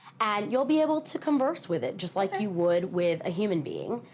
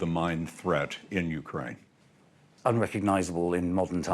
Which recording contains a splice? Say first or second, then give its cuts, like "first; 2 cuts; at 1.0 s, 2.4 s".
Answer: second; 1 cut; at 2.5 s